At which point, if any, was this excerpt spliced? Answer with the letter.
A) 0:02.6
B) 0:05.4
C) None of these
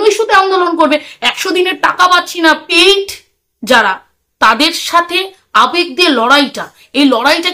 A